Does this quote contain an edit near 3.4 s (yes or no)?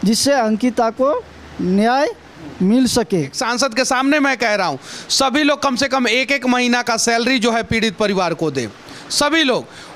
yes